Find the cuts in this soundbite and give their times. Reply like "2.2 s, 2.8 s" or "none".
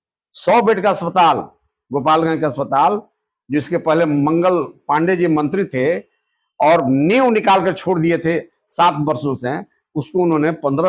none